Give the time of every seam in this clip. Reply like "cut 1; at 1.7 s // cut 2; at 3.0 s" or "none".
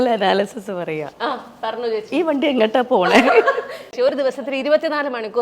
cut 1; at 4.0 s